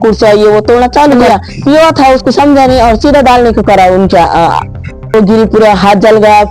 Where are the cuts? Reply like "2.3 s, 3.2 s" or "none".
1.2 s, 5.1 s